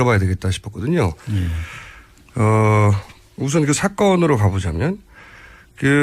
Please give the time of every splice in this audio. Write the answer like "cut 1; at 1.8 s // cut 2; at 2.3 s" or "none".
cut 1; at 1.8 s